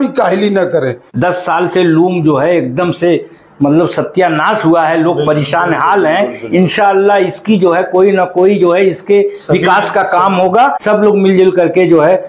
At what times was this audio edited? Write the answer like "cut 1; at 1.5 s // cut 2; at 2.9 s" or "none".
cut 1; at 1.0 s // cut 2; at 10.8 s